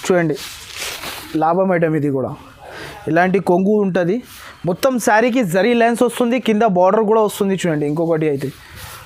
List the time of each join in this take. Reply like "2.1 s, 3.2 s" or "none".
none